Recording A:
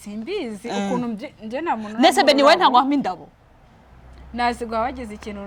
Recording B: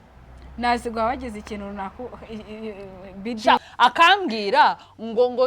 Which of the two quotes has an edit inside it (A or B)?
B